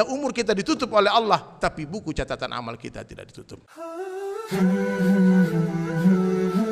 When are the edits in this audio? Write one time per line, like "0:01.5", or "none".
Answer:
0:03.6